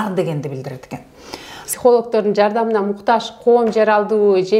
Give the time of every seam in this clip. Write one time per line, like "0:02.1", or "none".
0:01.6